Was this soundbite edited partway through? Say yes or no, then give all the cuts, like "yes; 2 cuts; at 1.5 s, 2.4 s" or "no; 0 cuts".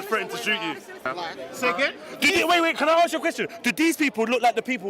yes; 1 cut; at 1.1 s